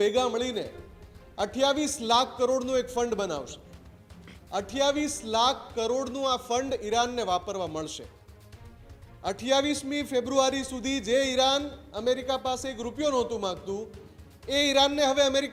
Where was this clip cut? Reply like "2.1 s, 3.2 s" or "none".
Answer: none